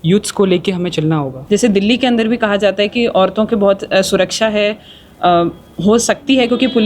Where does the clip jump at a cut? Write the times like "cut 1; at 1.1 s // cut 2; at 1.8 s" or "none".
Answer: cut 1; at 1.3 s